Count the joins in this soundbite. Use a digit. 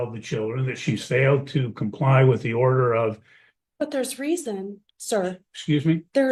0